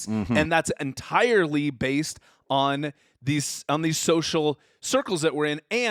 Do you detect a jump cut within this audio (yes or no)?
no